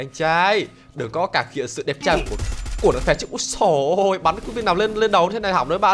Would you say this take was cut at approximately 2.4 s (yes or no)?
no